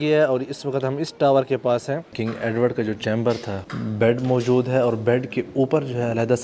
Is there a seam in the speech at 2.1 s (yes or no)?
yes